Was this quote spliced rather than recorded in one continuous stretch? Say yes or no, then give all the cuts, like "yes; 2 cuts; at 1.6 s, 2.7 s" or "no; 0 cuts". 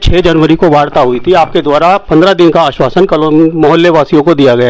no; 0 cuts